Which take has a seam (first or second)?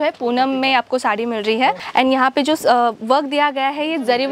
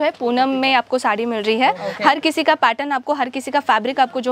first